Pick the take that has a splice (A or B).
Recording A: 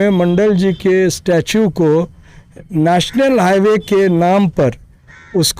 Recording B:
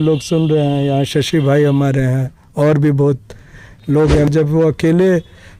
B